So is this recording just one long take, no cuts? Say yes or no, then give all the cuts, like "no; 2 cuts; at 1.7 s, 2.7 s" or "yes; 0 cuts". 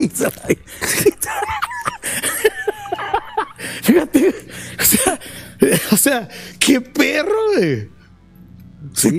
yes; 0 cuts